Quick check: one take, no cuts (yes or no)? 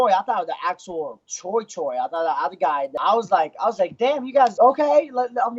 no